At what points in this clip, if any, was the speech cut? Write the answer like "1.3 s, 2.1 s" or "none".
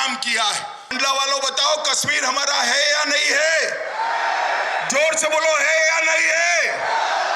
1.0 s